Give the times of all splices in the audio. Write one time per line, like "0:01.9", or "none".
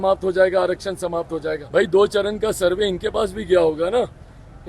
0:01.6